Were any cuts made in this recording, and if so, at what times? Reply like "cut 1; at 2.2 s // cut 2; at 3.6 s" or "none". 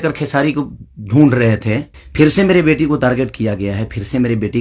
cut 1; at 2.0 s